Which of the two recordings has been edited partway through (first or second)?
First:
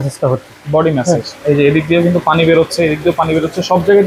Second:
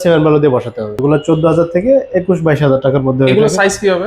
second